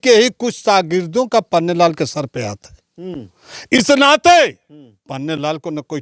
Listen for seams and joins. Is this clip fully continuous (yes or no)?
yes